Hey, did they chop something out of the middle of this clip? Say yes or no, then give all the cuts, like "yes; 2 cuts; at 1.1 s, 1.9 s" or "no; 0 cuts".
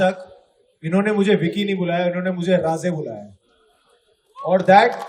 no; 0 cuts